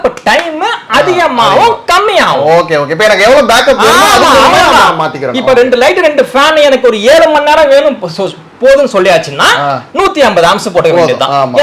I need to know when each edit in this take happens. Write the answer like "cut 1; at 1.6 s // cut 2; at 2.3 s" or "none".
none